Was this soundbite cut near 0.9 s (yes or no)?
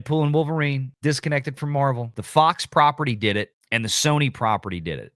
yes